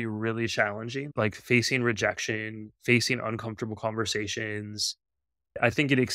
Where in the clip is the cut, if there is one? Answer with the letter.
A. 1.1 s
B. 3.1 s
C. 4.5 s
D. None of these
A